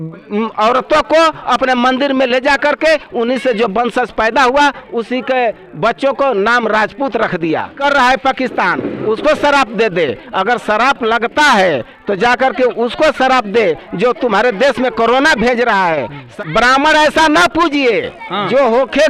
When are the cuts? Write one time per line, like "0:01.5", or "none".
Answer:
0:07.7
0:16.3